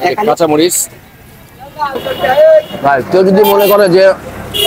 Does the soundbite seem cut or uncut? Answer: cut